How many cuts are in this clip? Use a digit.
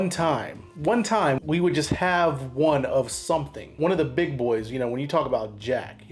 2